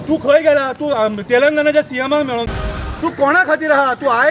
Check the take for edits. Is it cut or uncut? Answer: cut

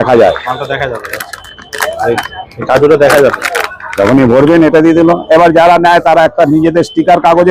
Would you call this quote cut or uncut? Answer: uncut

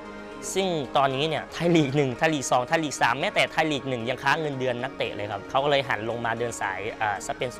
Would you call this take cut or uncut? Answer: uncut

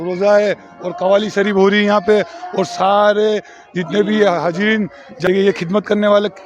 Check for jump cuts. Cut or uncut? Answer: cut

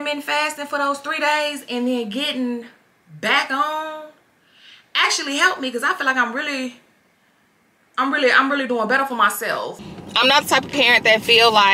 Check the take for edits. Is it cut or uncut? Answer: cut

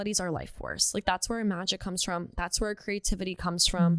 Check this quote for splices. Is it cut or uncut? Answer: uncut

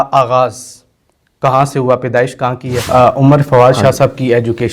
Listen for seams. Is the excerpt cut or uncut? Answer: cut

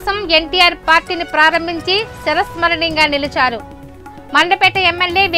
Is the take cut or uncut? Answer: uncut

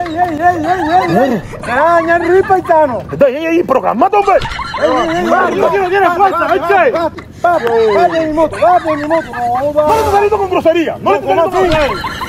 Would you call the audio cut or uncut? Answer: uncut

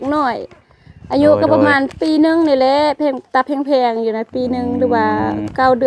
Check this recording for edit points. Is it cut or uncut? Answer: uncut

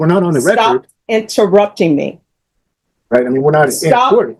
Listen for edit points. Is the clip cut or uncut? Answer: uncut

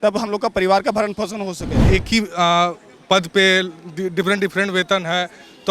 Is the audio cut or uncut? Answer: cut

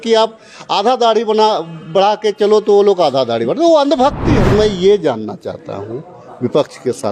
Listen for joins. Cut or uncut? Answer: cut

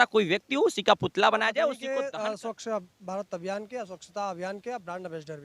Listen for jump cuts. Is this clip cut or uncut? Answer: cut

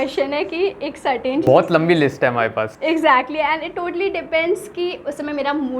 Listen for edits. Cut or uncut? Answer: uncut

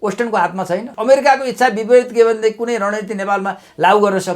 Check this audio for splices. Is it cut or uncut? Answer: cut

